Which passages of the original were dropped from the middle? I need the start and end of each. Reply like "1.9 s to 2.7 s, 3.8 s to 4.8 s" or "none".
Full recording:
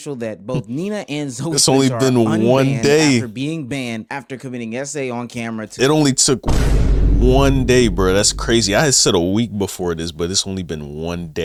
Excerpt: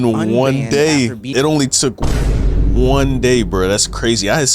3.4 s to 5.7 s